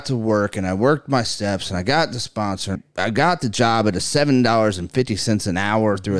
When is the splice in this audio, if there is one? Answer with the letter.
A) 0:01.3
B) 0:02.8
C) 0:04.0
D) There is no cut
B